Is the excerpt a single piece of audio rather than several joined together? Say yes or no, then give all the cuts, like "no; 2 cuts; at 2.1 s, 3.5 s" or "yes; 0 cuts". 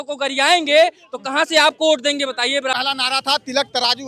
no; 1 cut; at 2.7 s